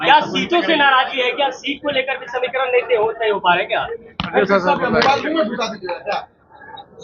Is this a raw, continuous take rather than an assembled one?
yes; 0 cuts

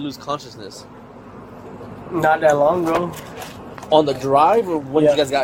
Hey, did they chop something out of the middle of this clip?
no; 0 cuts

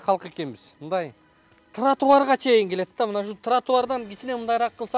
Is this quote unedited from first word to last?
yes; 0 cuts

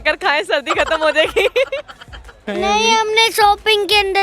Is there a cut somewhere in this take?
yes; 1 cut; at 2.4 s

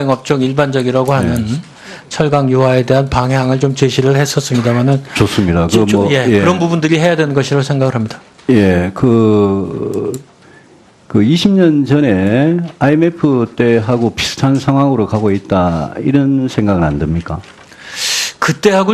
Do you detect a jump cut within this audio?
yes; 1 cut; at 11.4 s

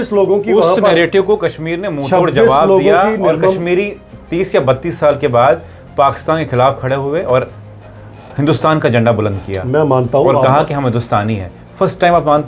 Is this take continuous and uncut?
yes; 0 cuts

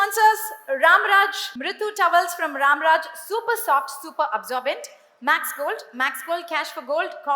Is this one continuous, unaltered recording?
yes; 0 cuts

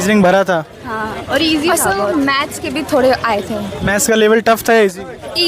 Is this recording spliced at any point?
no; 0 cuts

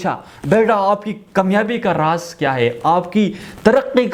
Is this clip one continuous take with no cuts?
yes; 0 cuts

